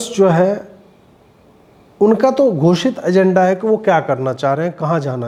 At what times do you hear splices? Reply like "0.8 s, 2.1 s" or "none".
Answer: none